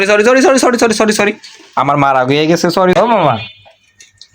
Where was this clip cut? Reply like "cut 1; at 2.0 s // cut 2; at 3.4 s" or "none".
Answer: cut 1; at 3.0 s